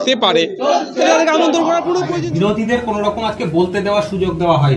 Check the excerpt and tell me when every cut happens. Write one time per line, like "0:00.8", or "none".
0:02.1